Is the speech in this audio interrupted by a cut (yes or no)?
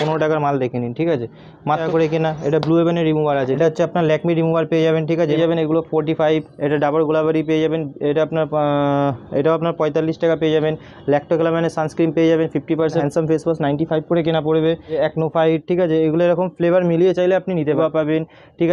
yes